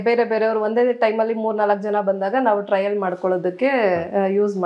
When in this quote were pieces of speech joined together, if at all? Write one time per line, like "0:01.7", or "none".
none

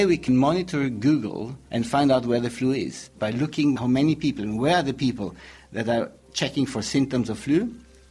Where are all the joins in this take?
0:01.5
0:03.1

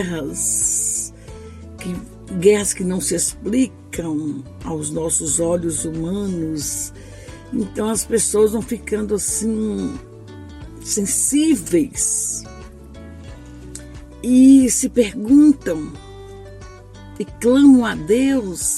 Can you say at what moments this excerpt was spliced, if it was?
0:12.1
0:14.2

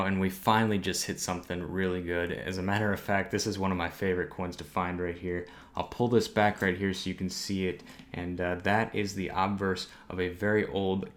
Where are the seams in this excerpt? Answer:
none

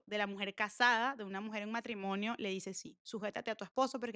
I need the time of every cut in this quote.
none

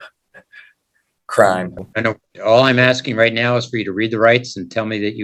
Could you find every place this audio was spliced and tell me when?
none

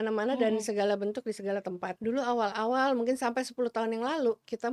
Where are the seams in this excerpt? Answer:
0:01.9

